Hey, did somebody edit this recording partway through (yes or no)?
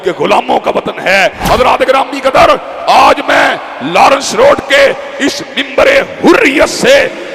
yes